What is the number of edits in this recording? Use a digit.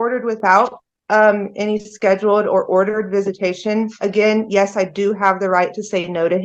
0